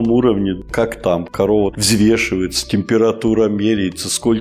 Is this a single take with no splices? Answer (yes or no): yes